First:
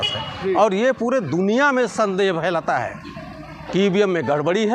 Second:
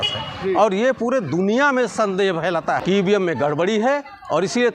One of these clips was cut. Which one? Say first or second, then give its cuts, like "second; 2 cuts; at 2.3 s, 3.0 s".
second; 1 cut; at 2.8 s